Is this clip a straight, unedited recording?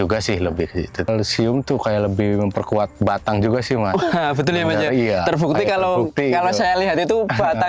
no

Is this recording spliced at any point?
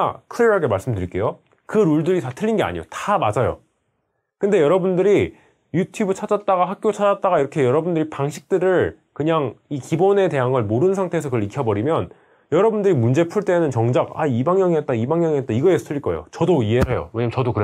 no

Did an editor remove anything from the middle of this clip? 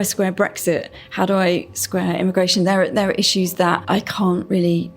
yes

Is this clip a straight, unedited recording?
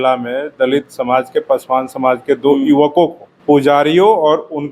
no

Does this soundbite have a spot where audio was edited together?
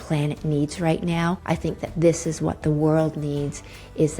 yes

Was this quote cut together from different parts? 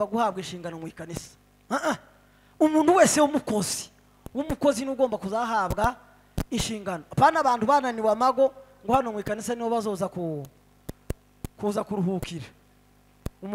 no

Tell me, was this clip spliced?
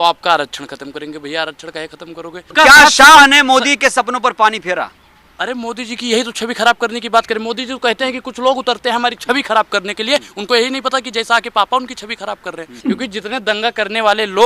yes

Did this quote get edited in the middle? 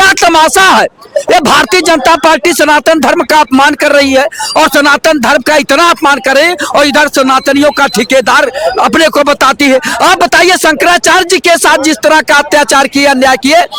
no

